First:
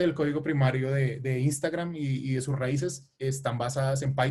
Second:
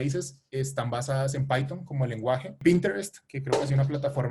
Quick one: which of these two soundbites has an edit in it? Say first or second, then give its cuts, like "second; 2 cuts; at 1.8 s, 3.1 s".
second; 1 cut; at 2.6 s